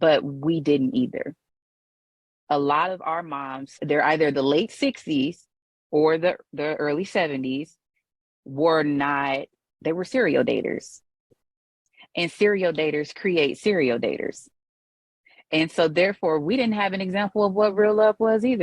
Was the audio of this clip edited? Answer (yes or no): yes